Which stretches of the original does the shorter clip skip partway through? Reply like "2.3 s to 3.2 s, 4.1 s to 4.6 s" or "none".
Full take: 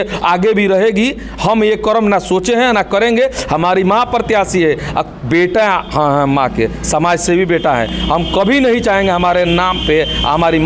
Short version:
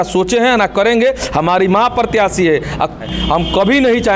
5.2 s to 7.9 s